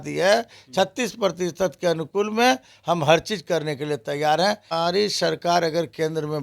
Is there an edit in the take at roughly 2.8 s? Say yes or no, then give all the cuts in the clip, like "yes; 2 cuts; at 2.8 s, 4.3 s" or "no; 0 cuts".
no; 1 cut; at 4.7 s